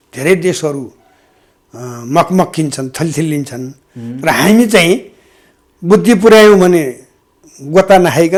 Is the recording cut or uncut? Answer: uncut